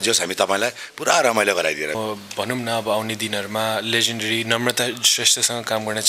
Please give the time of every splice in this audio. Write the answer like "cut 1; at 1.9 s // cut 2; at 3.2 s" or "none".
cut 1; at 2.0 s